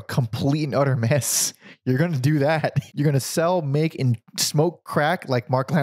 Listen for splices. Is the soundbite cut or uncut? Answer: cut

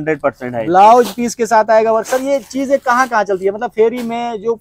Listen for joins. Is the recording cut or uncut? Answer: uncut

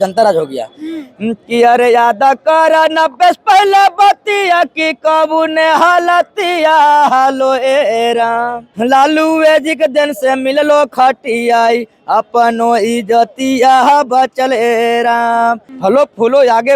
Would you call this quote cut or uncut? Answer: cut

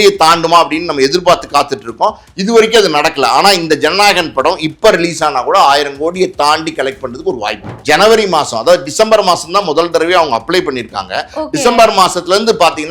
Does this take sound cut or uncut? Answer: cut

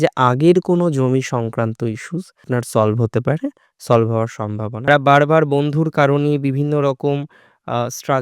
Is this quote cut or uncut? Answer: cut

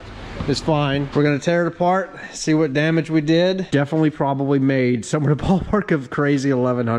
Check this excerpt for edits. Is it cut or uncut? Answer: cut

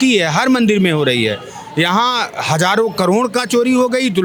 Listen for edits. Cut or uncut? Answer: uncut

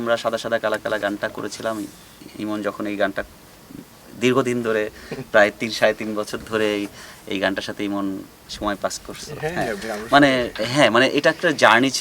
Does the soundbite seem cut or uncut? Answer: cut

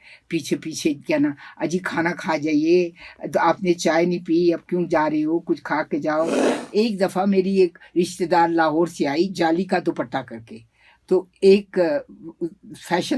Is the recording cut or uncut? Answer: cut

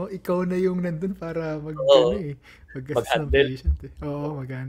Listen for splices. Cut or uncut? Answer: uncut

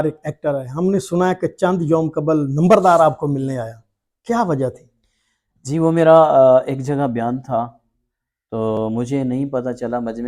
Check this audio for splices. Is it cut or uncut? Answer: uncut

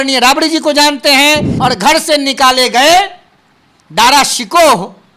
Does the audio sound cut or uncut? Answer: cut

